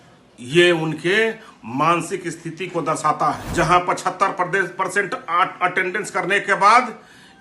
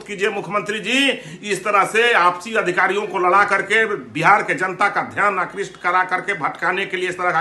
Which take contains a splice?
first; 1 cut; at 3.4 s

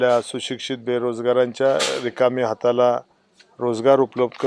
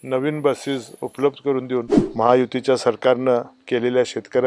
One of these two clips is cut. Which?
second; 1 cut; at 2.0 s

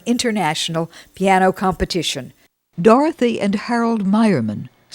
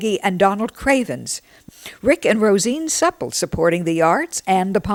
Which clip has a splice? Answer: first; 1 cut; at 2.6 s

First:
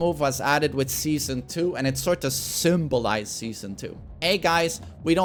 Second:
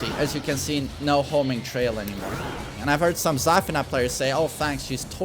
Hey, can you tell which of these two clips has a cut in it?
second; 1 cut; at 2.7 s

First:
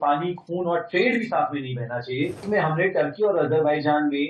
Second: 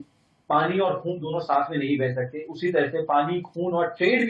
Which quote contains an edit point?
first; 1 cut; at 2.4 s

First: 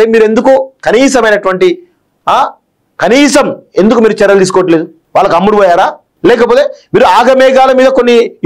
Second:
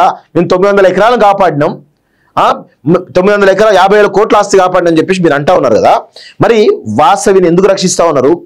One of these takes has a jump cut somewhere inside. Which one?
first; 2 cuts; at 5.0 s, 6.1 s

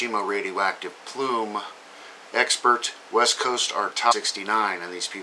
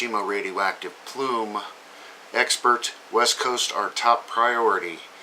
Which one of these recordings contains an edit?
second; 1 cut; at 4.1 s

